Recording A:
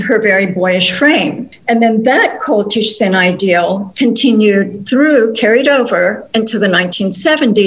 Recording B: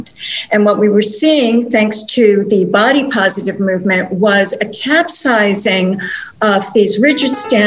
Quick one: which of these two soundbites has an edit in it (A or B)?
A